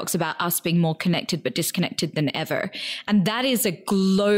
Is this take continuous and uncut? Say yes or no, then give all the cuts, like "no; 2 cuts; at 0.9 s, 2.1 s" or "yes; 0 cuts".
yes; 0 cuts